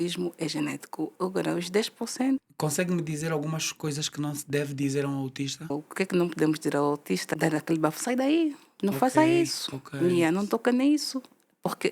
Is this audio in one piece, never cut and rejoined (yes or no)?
no